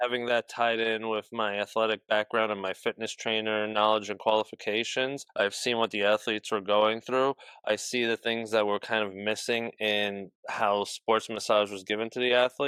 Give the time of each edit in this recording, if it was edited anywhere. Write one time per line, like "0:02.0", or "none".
none